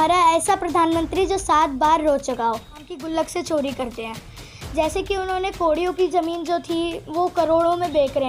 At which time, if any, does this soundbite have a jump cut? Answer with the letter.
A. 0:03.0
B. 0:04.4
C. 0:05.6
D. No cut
A